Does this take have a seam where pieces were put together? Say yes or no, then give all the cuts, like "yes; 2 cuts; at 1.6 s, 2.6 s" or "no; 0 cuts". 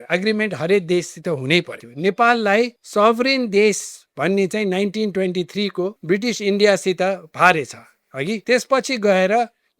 yes; 4 cuts; at 1.8 s, 2.8 s, 6.0 s, 8.4 s